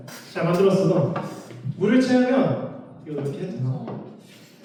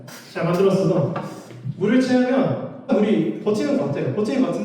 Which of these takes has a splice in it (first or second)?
second